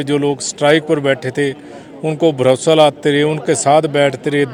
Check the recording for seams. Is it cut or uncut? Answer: uncut